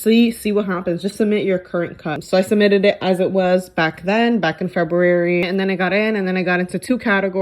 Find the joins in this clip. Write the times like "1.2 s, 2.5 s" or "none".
2.1 s, 5.4 s